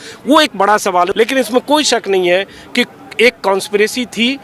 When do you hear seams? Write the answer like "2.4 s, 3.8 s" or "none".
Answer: 1.1 s